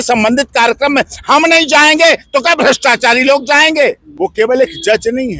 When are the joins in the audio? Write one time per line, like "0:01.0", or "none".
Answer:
0:04.1